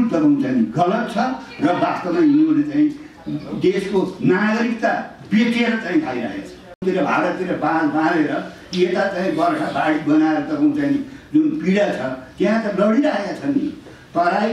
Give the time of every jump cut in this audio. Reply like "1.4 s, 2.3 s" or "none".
6.6 s